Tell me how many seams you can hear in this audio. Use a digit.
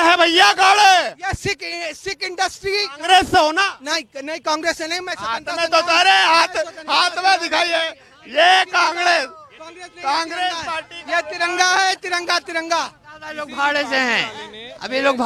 0